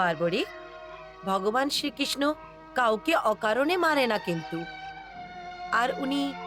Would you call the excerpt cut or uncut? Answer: uncut